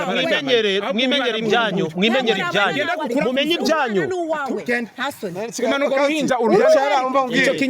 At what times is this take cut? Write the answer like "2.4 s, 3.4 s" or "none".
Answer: none